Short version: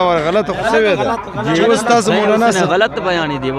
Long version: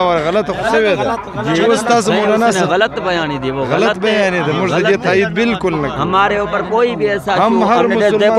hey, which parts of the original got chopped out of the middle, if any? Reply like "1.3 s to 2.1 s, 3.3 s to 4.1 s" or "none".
none

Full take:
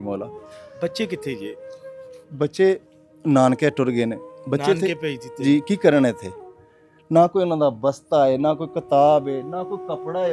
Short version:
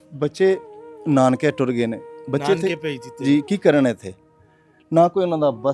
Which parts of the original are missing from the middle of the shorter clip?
none

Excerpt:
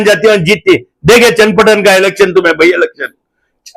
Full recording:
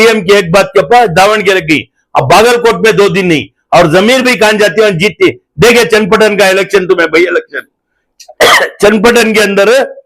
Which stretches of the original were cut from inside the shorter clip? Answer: none

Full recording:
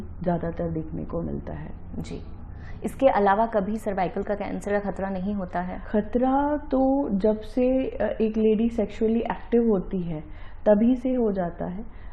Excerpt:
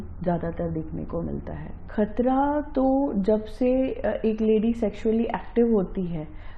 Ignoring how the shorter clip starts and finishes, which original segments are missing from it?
1.8 s to 5.8 s

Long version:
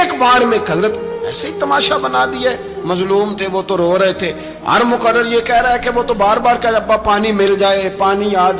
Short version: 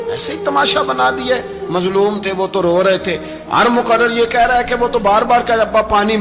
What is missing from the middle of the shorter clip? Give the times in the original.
none

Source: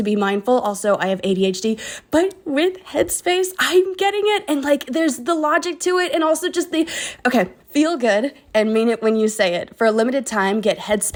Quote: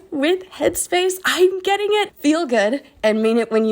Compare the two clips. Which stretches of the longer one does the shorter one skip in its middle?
4.4 s to 7.6 s

